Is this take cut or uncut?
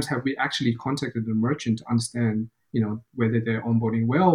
uncut